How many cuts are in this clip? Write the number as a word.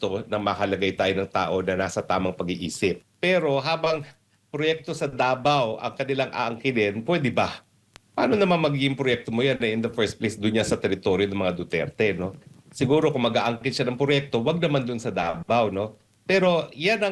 one